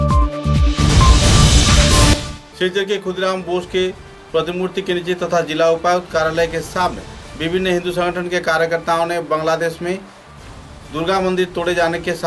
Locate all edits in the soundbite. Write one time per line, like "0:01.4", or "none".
none